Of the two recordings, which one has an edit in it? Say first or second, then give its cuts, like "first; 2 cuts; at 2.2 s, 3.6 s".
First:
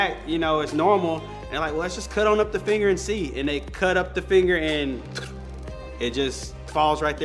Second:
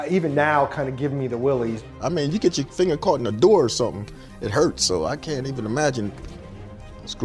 second; 1 cut; at 1.9 s